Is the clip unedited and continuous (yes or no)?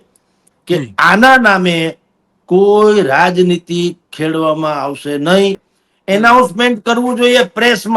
no